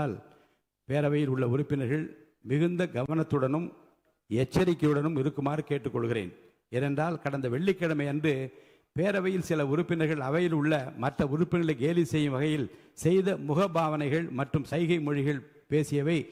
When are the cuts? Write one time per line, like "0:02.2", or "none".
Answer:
none